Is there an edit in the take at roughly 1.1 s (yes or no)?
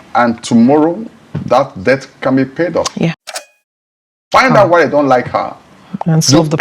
no